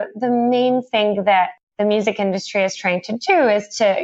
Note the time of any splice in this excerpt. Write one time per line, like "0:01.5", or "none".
none

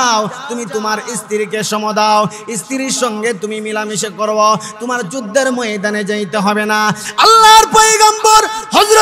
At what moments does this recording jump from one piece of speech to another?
none

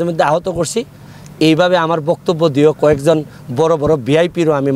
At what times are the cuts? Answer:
none

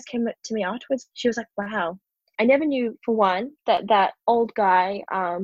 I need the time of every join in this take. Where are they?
0:01.1
0:02.2

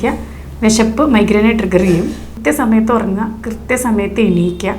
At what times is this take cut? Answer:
0:02.3

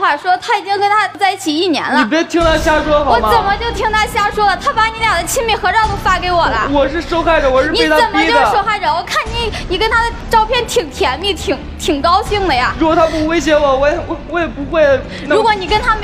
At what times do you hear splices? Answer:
0:02.0

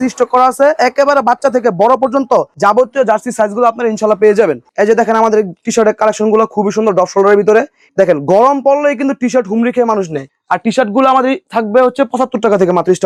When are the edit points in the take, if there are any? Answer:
none

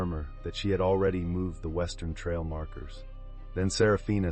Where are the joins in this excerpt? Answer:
none

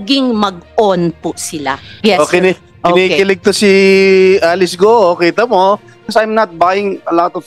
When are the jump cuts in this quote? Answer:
0:01.8
0:06.0

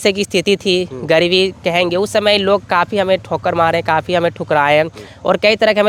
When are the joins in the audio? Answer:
none

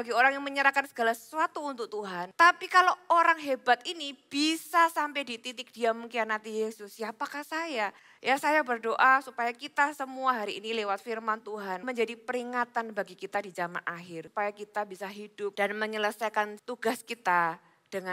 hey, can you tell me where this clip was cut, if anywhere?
0:02.2
0:08.1
0:11.8
0:14.2
0:15.5
0:16.6

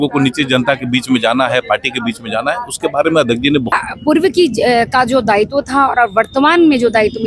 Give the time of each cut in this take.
0:03.8

